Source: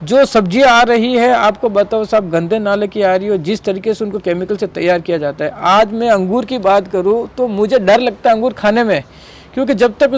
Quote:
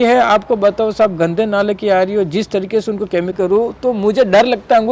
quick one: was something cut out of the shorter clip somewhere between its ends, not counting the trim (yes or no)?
yes